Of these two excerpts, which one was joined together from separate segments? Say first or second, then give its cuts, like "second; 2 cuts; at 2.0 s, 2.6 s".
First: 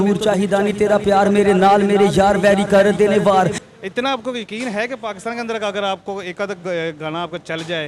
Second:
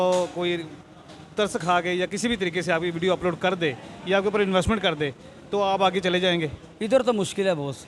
first; 1 cut; at 3.6 s